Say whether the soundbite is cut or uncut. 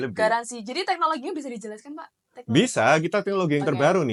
uncut